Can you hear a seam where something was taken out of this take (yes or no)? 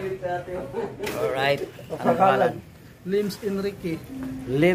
yes